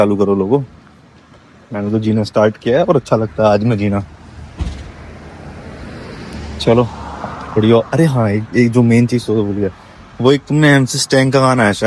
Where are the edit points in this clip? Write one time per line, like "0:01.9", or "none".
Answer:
none

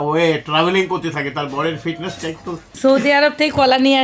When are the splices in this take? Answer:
0:02.7

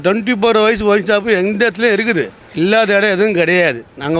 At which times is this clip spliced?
0:02.4

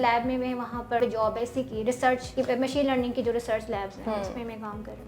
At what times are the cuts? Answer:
0:01.0
0:02.3

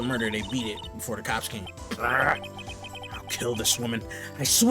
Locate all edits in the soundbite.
0:01.7

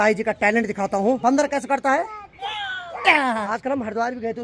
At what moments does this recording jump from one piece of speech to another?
0:01.2
0:03.5

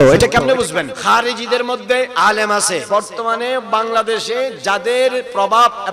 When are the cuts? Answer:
0:00.9
0:02.8

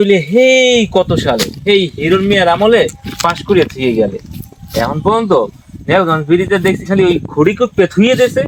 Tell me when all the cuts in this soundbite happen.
none

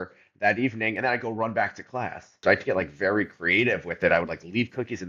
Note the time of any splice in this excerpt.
0:02.4

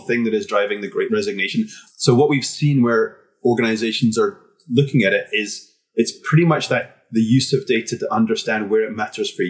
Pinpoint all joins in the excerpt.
0:01.8

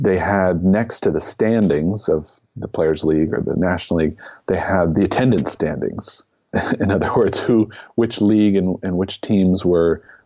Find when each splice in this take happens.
0:04.9
0:06.5

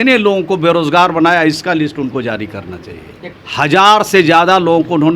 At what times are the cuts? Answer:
0:03.2

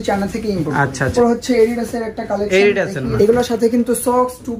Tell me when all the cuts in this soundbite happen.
0:01.1
0:03.0

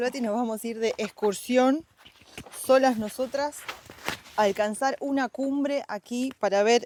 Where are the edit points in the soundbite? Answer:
none

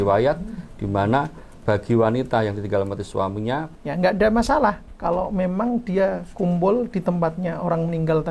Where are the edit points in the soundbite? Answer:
0:03.7

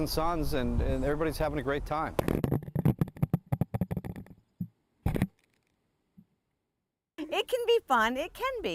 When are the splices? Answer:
0:07.1

